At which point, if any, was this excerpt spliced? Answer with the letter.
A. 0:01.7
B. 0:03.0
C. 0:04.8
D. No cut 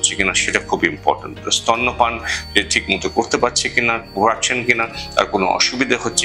D